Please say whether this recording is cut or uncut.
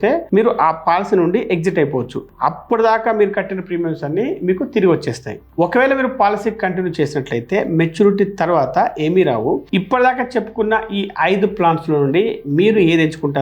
uncut